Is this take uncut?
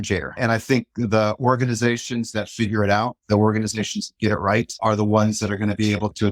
yes; 0 cuts

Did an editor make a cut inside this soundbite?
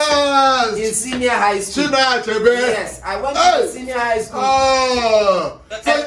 no; 0 cuts

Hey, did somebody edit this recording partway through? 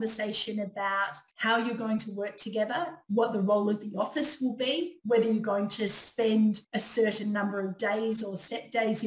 yes; 2 cuts; at 1.2 s, 6.7 s

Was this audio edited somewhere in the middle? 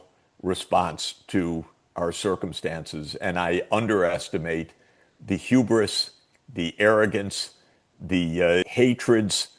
yes; 1 cut; at 8.7 s

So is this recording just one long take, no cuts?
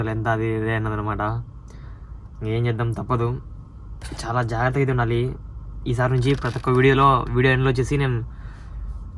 yes; 0 cuts

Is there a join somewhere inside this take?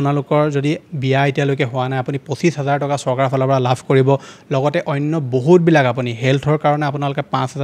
no; 0 cuts

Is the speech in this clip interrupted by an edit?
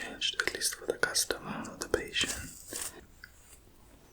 yes; 1 cut; at 3.0 s

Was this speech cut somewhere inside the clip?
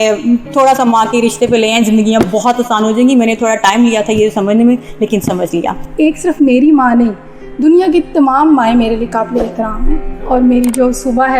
yes; 2 cuts; at 5.8 s, 10.1 s

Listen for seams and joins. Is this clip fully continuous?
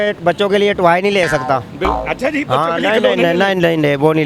yes; 0 cuts

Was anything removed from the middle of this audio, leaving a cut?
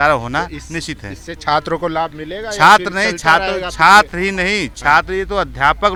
no; 0 cuts

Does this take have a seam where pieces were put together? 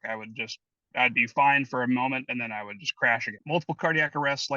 yes; 1 cut; at 3.3 s

